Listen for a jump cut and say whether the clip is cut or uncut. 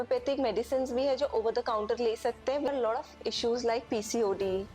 cut